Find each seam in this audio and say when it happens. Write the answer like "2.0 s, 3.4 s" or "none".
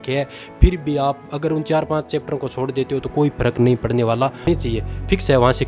4.5 s